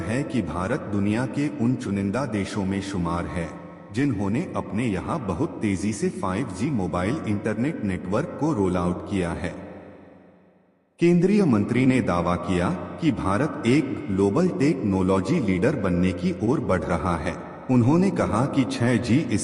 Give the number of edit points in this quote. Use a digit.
1